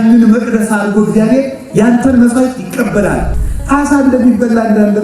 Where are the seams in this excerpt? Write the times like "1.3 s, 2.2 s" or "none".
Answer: 3.4 s